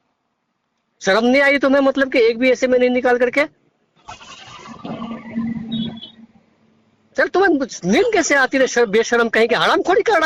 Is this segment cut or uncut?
uncut